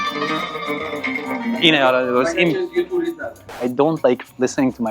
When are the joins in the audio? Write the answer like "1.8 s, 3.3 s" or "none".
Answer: none